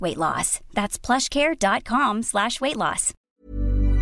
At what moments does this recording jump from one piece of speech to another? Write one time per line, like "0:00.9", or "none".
0:03.1